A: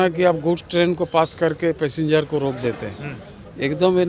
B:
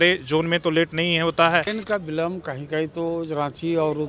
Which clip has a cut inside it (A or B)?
B